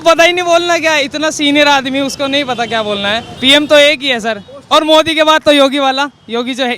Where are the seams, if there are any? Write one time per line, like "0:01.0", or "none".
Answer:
0:03.3